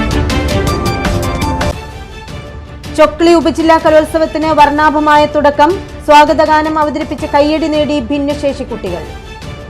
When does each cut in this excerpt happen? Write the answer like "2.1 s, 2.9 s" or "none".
1.6 s

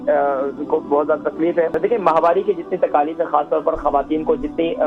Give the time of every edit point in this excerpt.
1.8 s

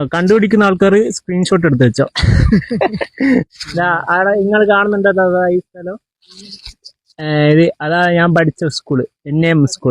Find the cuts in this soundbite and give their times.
3.6 s

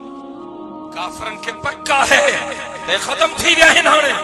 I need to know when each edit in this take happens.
1.0 s

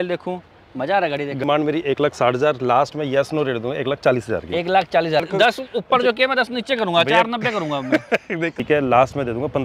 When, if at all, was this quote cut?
1.4 s, 5.3 s, 8.6 s

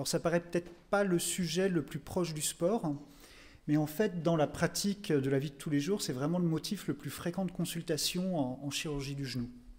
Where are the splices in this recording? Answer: none

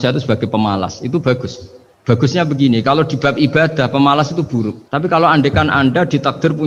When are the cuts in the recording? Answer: none

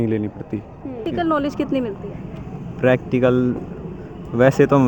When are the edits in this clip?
1.0 s

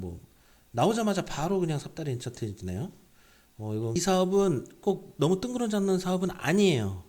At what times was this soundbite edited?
3.9 s

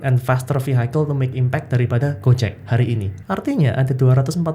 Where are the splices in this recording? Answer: 3.1 s

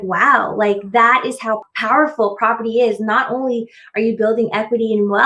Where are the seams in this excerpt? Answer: 1.7 s

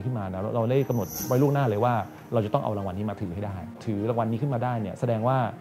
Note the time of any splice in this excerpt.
1.1 s, 3.8 s

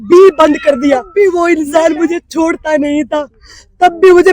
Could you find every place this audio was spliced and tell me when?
1.1 s

